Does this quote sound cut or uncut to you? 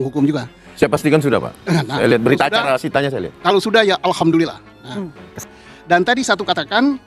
cut